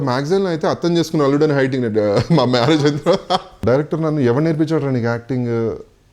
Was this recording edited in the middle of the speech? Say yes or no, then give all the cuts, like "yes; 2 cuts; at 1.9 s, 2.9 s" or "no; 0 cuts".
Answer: yes; 1 cut; at 3.5 s